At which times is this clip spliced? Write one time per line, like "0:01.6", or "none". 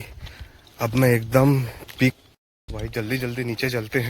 0:02.2